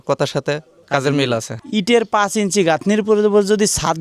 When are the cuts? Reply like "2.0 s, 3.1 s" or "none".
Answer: 1.6 s

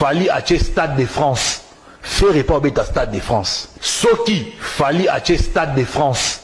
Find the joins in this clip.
3.9 s

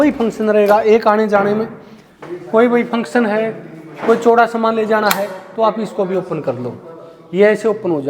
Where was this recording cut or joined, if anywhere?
none

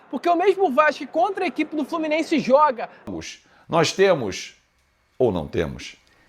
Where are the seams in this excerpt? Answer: 3.1 s

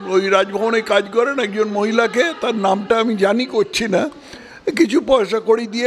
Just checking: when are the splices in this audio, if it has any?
none

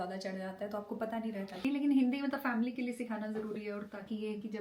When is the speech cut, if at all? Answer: 1.5 s

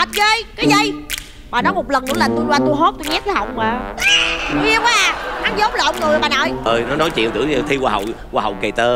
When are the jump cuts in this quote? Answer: 6.7 s

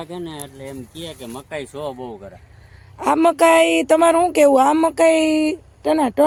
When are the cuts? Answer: none

